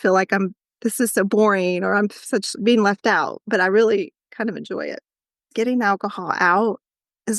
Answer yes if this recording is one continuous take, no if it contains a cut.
no